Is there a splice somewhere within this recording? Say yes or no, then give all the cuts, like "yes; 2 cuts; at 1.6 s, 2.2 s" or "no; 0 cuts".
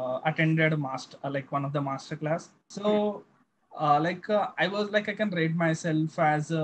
yes; 1 cut; at 2.6 s